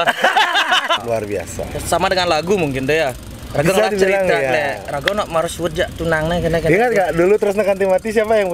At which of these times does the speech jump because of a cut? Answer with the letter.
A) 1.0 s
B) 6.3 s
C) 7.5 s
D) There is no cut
A